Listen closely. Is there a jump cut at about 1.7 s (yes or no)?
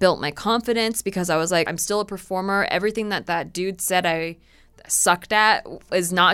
yes